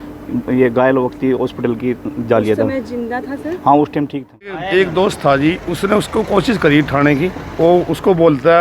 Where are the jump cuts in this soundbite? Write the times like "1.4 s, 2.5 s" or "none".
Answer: 4.6 s